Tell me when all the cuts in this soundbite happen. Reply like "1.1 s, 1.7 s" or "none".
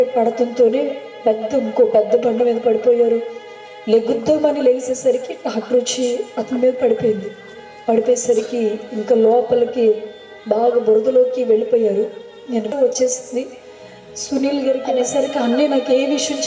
12.7 s, 14.9 s